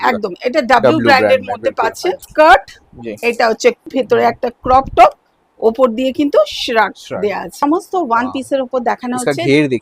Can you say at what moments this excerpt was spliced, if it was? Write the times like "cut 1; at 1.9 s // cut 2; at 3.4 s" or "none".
cut 1; at 2.3 s // cut 2; at 3.9 s // cut 3; at 7.6 s

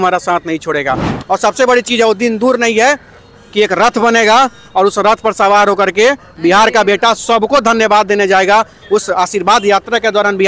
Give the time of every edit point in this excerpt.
cut 1; at 1.1 s

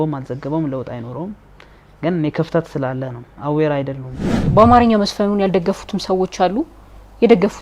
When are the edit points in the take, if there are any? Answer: cut 1; at 4.4 s

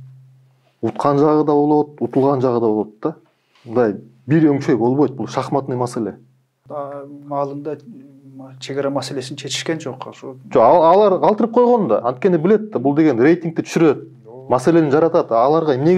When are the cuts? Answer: cut 1; at 6.7 s

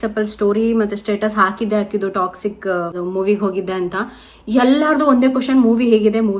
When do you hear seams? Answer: none

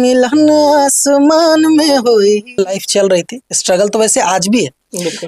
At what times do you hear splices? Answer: cut 1; at 2.8 s

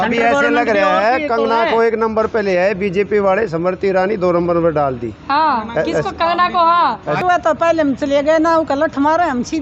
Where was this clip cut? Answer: cut 1; at 7.2 s

